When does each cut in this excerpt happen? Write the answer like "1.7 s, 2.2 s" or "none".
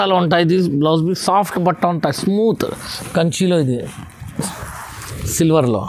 4.4 s